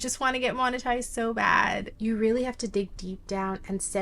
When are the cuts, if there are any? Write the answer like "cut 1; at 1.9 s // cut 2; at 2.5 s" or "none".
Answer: cut 1; at 1.9 s